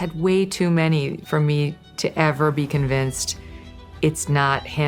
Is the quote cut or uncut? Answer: uncut